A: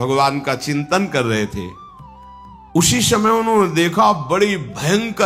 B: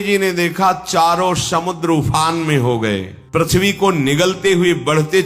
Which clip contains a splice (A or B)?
B